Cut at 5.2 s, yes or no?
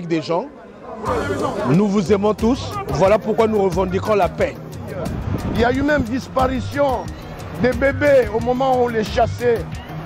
yes